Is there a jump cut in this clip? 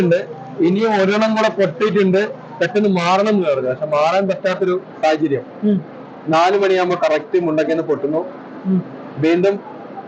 no; 0 cuts

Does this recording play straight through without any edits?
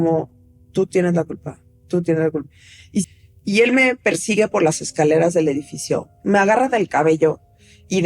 no; 1 cut; at 3.1 s

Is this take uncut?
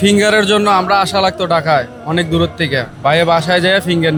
yes; 0 cuts

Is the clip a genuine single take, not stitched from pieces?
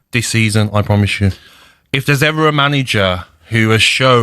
no; 1 cut; at 1.4 s

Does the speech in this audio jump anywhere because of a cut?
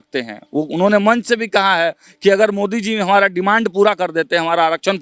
no; 0 cuts

